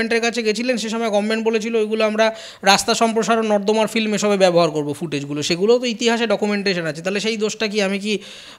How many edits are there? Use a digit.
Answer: 0